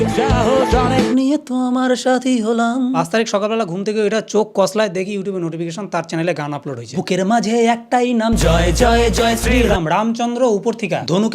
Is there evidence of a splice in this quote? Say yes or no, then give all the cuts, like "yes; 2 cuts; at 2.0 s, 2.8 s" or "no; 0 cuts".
yes; 2 cuts; at 1.1 s, 3.0 s